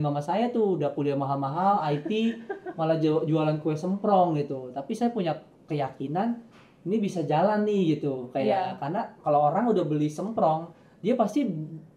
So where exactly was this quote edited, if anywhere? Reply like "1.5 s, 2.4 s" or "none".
none